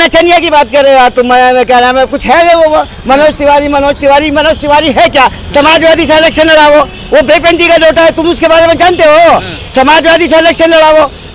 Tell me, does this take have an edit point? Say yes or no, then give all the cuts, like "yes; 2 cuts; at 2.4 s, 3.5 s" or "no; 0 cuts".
no; 0 cuts